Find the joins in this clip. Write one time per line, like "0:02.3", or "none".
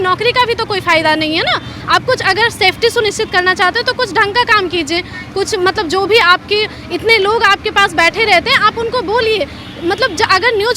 none